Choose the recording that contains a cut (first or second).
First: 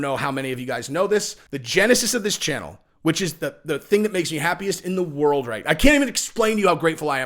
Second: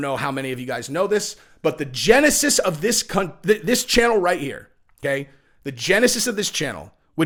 first